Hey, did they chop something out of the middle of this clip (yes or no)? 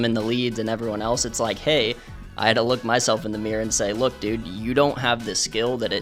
no